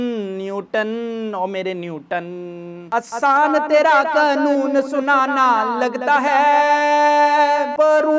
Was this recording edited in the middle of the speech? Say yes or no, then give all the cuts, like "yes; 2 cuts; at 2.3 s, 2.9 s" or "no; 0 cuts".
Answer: yes; 1 cut; at 2.8 s